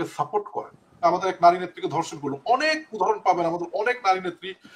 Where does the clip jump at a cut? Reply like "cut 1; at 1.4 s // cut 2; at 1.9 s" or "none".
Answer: cut 1; at 1.0 s